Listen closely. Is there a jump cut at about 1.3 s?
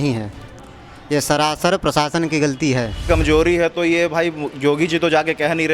no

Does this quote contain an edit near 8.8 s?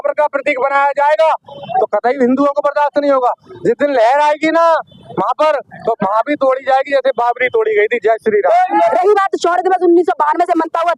yes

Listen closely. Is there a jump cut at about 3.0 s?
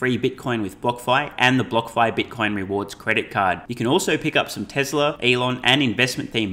no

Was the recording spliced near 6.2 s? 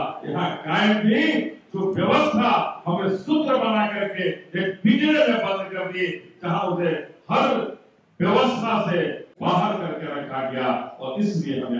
no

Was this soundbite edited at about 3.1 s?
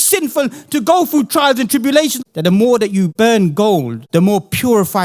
yes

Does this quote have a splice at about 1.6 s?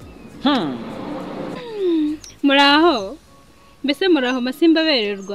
yes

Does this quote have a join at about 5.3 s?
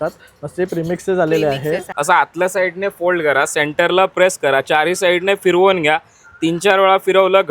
no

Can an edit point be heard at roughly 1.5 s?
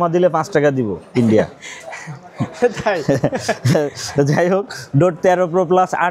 no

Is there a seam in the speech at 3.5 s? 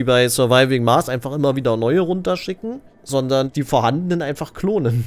yes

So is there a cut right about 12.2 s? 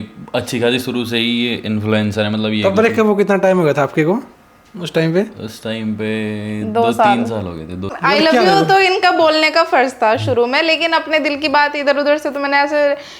no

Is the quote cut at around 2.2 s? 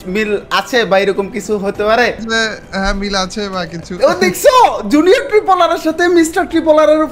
yes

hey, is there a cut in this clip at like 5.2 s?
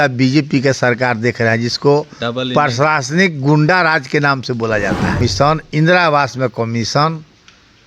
yes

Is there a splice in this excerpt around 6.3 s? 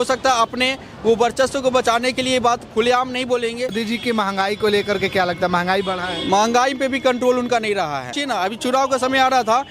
no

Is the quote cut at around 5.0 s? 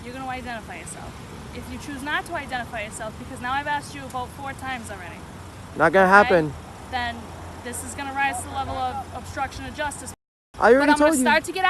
no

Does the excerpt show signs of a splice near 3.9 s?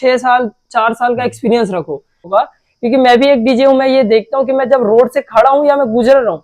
no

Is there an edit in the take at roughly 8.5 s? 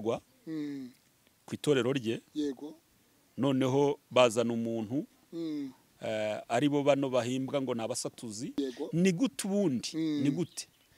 yes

